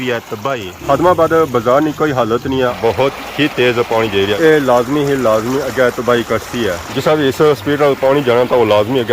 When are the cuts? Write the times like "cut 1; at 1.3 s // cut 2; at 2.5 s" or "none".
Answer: cut 1; at 2.7 s // cut 2; at 6.8 s